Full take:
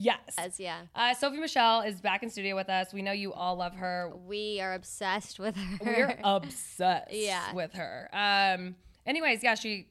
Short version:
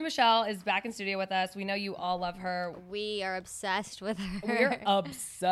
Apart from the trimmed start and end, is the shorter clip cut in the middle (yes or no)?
no